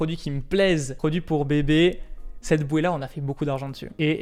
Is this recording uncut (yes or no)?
yes